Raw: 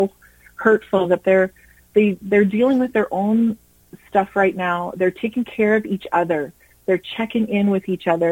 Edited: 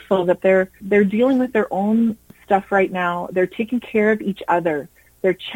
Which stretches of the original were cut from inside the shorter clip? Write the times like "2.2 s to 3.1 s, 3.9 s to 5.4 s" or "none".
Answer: 1.6 s to 2.2 s, 3.7 s to 3.9 s